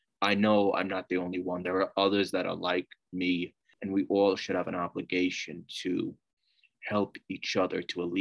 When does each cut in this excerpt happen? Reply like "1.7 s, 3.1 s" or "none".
3.7 s

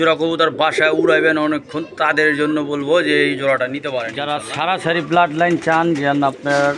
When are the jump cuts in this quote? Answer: 4.1 s

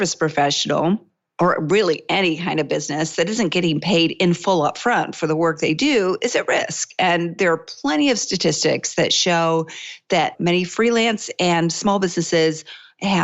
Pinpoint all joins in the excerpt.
1.2 s

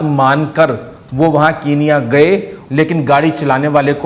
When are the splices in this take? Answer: 2.5 s

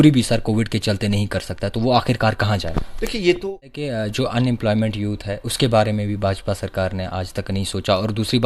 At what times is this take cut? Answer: 3.8 s

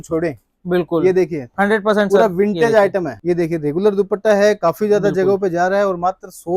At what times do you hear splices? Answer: 3.1 s

